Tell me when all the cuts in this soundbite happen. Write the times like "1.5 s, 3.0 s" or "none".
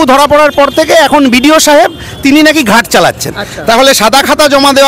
none